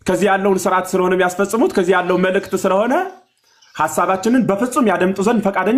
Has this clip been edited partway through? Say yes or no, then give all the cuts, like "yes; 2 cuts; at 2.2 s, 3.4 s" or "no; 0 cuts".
no; 0 cuts